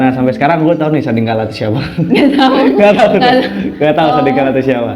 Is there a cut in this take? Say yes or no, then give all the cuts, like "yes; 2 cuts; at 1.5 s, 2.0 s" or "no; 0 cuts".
no; 0 cuts